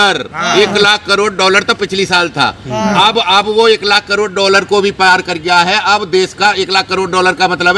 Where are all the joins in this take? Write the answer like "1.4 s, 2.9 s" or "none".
none

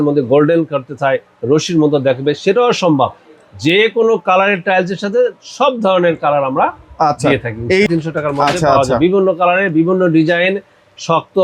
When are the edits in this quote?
7.9 s

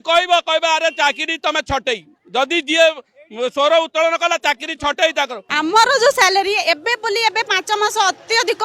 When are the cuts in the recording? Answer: 5.4 s

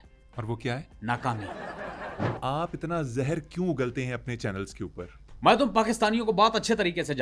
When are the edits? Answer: 2.3 s, 5.2 s

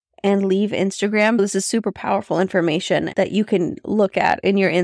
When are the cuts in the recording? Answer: 1.4 s, 3.1 s

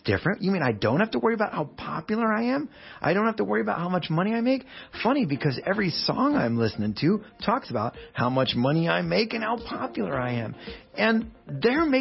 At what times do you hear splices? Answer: none

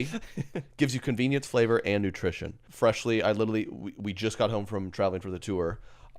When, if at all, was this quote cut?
2.6 s

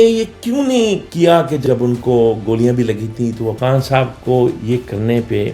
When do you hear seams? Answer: 3.5 s

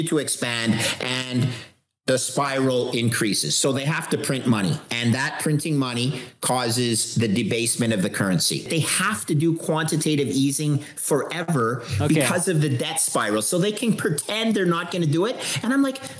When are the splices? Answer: 8.7 s

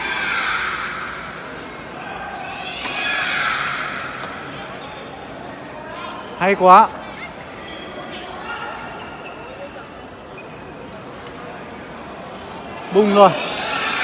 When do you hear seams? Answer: none

